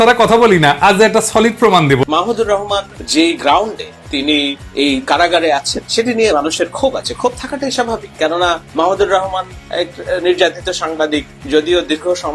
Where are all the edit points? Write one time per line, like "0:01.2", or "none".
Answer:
0:02.0
0:03.0
0:04.6
0:08.7
0:11.3